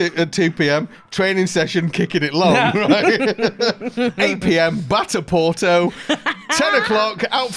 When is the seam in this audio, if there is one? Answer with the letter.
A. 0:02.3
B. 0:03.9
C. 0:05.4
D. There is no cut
B